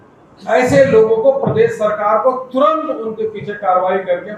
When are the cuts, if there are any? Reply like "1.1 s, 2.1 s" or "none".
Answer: none